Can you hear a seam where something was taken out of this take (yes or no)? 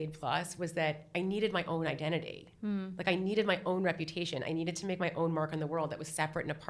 no